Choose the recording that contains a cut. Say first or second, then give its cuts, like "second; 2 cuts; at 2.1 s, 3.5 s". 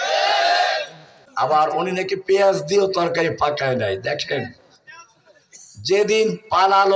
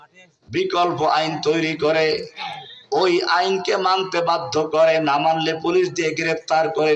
first; 1 cut; at 1.2 s